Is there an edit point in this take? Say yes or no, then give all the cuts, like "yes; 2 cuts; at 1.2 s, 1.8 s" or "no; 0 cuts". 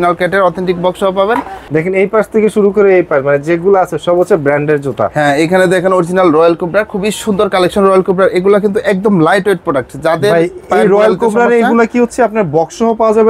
yes; 1 cut; at 1.6 s